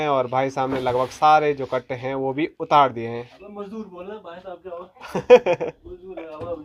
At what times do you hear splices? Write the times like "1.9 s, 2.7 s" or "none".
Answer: none